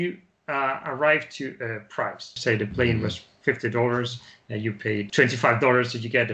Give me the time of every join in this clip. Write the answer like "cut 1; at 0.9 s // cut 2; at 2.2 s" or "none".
cut 1; at 2.4 s // cut 2; at 5.1 s